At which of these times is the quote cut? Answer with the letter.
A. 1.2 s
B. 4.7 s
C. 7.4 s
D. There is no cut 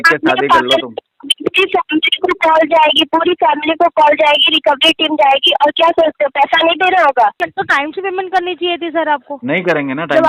C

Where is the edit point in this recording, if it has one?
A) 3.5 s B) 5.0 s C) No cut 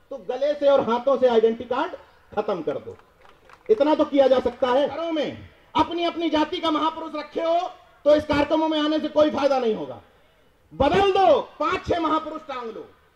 B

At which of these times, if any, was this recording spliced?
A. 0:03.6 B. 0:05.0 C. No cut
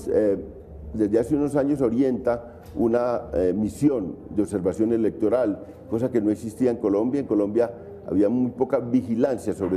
C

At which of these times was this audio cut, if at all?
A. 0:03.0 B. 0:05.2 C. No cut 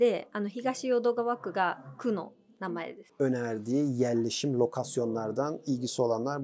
A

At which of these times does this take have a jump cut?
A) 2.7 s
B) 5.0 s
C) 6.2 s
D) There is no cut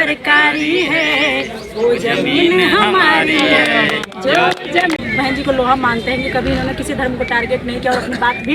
B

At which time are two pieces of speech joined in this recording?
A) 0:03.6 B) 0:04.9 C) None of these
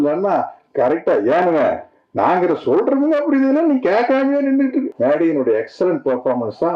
B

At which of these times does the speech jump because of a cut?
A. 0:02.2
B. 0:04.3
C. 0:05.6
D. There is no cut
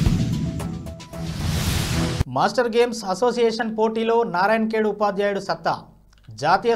A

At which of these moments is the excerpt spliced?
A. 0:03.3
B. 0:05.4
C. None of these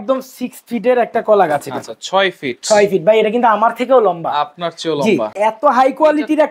B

